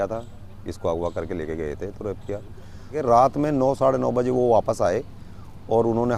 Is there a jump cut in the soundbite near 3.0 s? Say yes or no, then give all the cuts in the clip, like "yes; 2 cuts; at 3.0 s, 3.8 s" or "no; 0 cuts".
yes; 1 cut; at 3.0 s